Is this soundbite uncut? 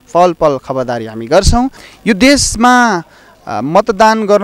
no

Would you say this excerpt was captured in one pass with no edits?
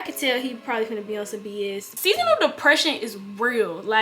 no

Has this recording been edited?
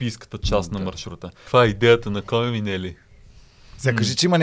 yes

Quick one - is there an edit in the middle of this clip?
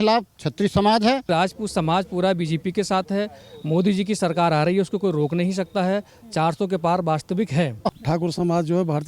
yes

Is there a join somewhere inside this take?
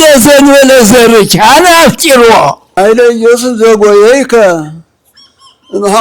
yes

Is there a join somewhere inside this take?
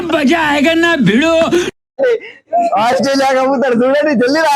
yes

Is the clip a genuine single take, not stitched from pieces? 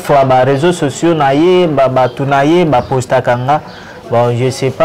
yes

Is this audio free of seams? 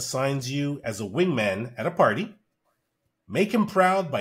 yes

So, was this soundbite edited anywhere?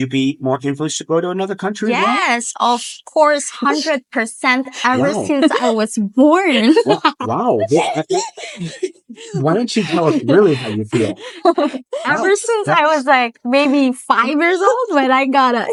no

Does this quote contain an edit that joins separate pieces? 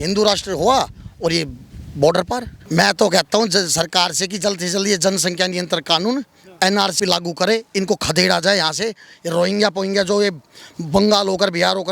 yes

